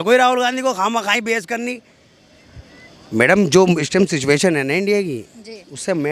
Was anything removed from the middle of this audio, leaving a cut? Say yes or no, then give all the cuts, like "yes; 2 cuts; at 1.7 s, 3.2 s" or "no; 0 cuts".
no; 0 cuts